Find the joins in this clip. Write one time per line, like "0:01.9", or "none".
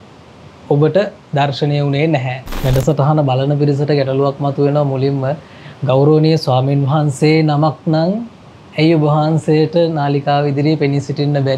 0:02.5